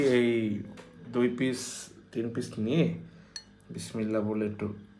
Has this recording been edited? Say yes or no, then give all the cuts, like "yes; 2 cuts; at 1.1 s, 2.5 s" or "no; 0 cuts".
no; 0 cuts